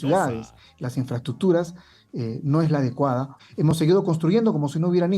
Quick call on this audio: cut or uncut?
cut